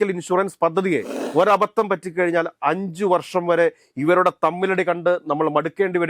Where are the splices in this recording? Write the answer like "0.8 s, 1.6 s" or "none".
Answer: 1.2 s

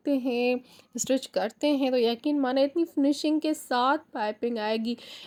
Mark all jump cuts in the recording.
none

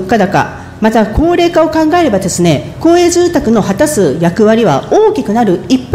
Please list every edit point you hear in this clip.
none

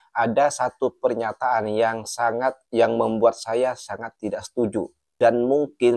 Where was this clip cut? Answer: none

